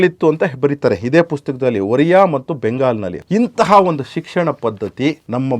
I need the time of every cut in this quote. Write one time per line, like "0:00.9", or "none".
0:03.1